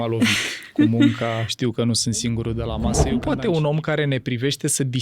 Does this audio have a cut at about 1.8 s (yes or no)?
no